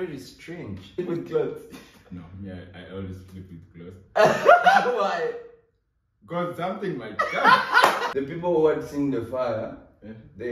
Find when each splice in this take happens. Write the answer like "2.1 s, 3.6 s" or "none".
1.0 s, 8.1 s